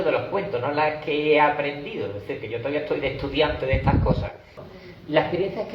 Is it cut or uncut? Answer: cut